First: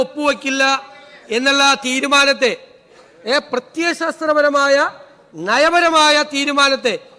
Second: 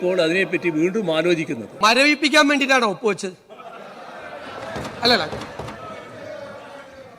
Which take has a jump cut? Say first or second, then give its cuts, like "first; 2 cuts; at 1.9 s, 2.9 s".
second; 1 cut; at 1.6 s